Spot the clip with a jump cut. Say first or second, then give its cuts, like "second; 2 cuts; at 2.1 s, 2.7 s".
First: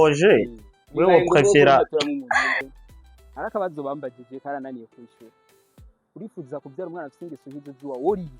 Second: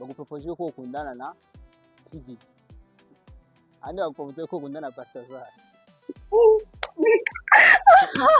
first; 1 cut; at 2.7 s